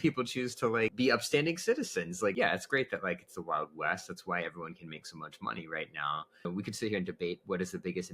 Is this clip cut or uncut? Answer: cut